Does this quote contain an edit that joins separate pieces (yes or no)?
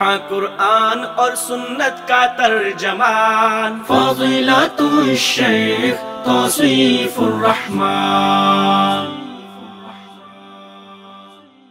no